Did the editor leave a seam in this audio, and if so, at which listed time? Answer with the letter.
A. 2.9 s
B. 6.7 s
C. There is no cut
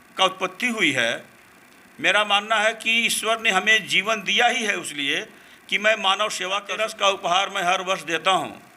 B